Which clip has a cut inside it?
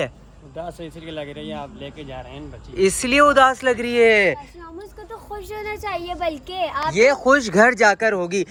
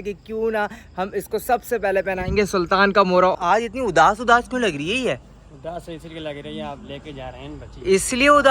second; 1 cut; at 3.3 s

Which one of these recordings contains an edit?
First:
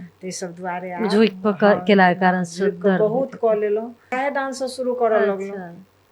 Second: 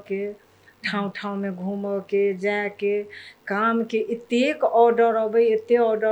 first; 1 cut; at 4.1 s

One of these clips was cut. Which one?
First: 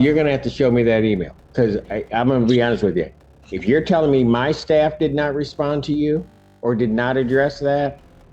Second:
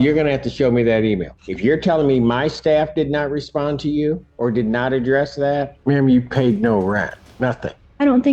second; 4 cuts; at 1.4 s, 4.3 s, 5.7 s, 7.5 s

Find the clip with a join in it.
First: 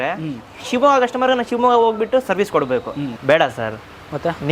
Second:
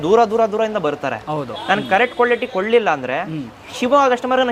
first; 1 cut; at 3.1 s

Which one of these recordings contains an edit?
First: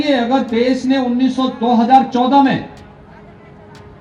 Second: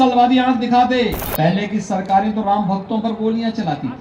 second; 1 cut; at 1.2 s

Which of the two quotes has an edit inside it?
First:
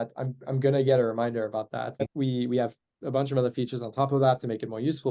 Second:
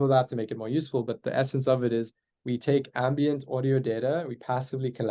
first; 1 cut; at 2.0 s

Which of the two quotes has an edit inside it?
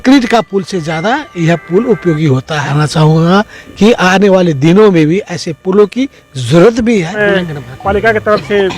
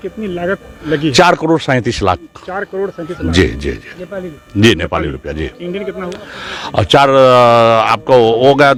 first; 2 cuts; at 2.7 s, 7.1 s

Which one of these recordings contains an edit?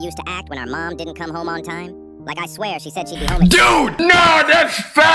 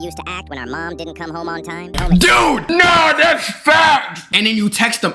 second; 2 cuts; at 1.9 s, 4.2 s

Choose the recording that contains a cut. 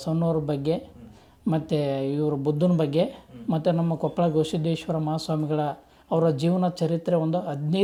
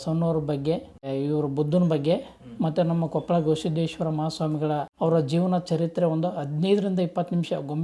second; 2 cuts; at 1.1 s, 4.9 s

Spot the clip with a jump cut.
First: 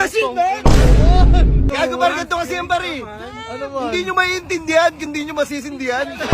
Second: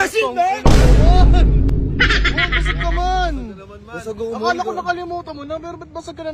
first; 1 cut; at 1.7 s

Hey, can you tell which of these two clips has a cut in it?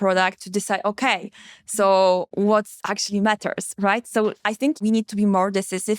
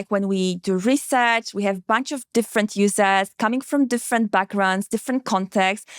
first; 2 cuts; at 2.3 s, 4.8 s

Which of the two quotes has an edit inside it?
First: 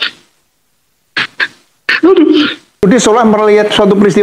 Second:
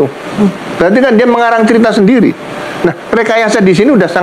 first; 1 cut; at 2.8 s

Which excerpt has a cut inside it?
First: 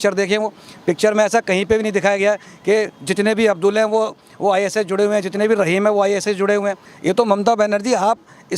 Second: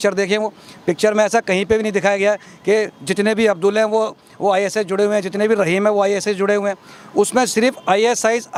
first; 1 cut; at 6.9 s

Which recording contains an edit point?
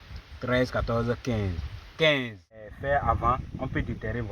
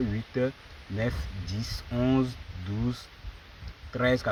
first; 1 cut; at 2.7 s

